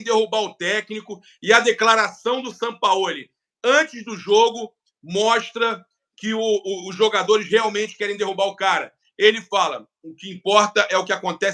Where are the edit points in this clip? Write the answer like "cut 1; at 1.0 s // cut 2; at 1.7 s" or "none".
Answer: none